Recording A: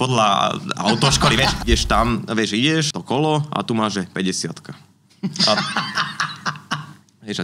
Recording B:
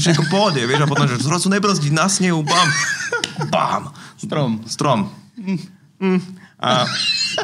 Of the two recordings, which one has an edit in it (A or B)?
A